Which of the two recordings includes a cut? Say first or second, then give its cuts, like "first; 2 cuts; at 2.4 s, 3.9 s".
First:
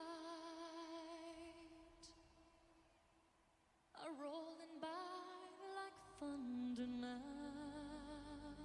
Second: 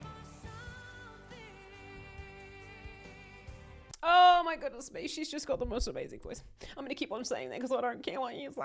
second; 1 cut; at 3.9 s